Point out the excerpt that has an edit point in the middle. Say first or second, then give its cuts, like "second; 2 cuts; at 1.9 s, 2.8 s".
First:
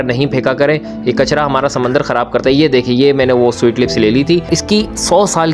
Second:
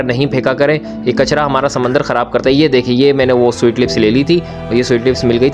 first; 1 cut; at 4.6 s